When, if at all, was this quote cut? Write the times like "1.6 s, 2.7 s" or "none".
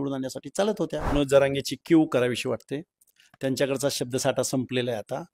1.1 s